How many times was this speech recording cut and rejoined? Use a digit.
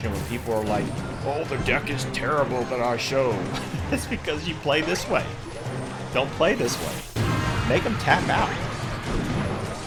0